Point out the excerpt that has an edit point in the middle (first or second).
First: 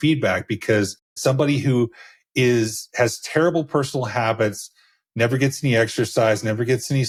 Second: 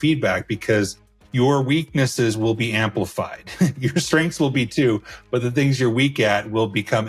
second